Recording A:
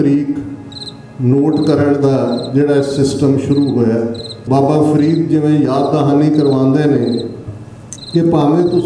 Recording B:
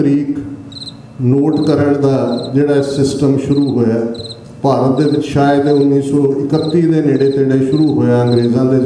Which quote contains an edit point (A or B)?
A